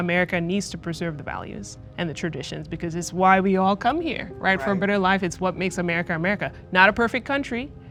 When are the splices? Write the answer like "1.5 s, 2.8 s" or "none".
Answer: none